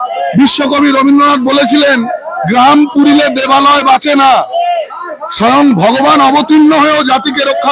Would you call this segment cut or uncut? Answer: uncut